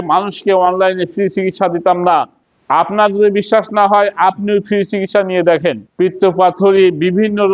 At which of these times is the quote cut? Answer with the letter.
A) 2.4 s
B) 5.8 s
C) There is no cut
B